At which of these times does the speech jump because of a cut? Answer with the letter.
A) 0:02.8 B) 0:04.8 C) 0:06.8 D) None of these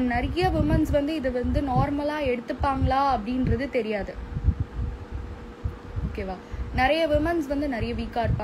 D